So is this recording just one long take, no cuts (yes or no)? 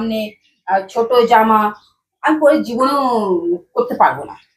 yes